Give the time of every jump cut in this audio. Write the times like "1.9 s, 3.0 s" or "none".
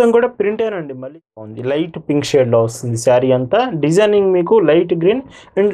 1.4 s